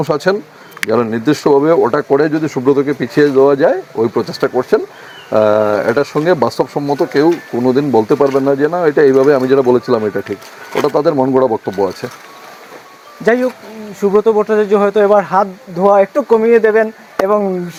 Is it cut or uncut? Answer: uncut